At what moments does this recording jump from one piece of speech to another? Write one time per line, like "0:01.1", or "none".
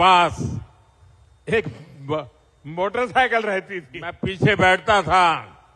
0:04.2